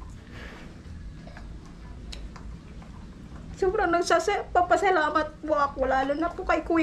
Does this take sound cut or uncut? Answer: uncut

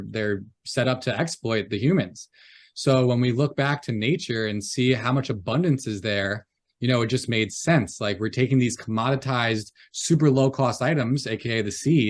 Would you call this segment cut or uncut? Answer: uncut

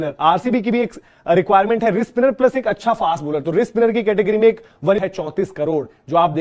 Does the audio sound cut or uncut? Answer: cut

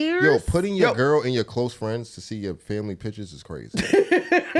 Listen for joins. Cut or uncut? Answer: uncut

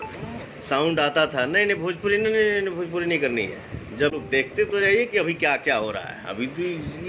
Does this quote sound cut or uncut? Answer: cut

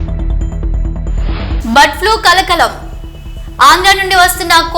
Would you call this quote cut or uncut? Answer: uncut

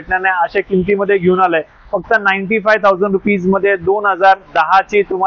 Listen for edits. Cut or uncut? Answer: uncut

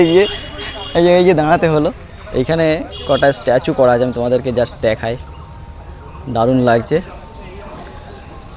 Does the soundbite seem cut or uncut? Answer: uncut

